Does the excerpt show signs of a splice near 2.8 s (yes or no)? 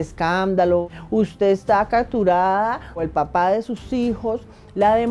no